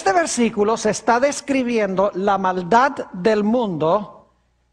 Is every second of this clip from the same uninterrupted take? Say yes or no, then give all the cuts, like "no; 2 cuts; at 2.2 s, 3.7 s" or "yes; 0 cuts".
yes; 0 cuts